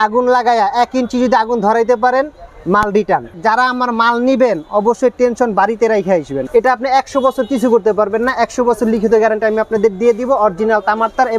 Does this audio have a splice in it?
yes; 2 cuts; at 3.4 s, 6.4 s

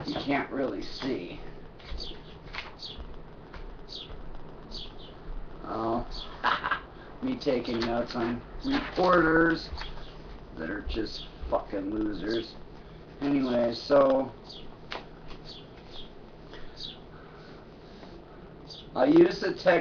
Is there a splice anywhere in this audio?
no; 0 cuts

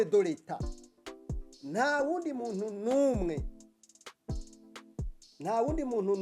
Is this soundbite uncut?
no; 2 cuts; at 3.4 s, 5.2 s

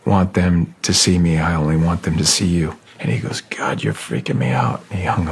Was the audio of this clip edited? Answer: yes; 1 cut; at 2.9 s

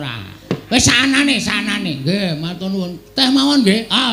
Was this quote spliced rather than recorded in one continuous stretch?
no; 0 cuts

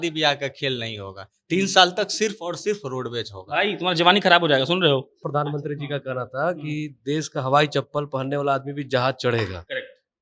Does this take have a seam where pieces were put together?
yes; 1 cut; at 5.2 s

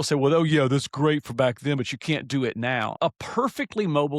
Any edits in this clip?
yes; 1 cut; at 2.9 s

